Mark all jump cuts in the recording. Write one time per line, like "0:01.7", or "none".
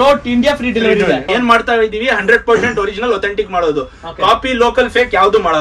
0:01.3